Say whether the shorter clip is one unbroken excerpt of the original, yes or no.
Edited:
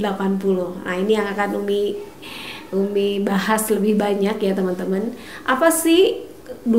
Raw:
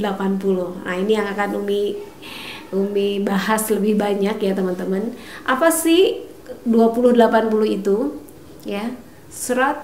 yes